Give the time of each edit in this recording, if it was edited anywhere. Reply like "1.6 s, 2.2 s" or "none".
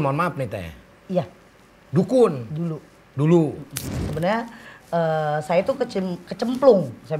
3.9 s